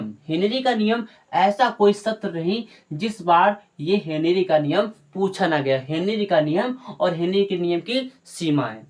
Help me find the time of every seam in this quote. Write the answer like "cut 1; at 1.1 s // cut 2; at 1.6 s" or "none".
none